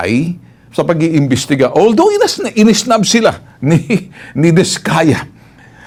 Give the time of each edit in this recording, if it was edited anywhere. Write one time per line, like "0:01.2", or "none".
none